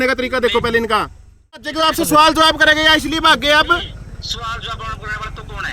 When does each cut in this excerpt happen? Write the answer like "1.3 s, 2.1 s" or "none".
1.7 s